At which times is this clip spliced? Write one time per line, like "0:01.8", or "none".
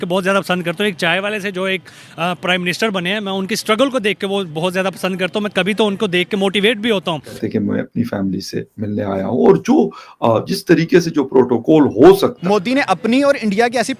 0:07.3
0:12.4